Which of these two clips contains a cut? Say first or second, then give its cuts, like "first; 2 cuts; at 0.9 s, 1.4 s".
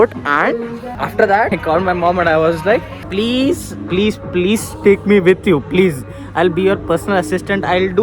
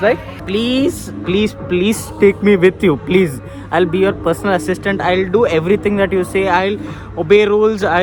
first; 2 cuts; at 0.9 s, 1.5 s